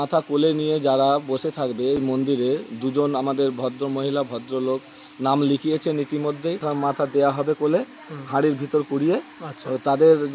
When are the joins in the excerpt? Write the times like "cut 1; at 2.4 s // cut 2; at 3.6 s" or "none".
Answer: cut 1; at 6.7 s